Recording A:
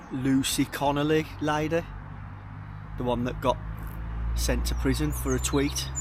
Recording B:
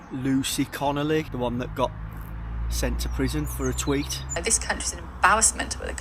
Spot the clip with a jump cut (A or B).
B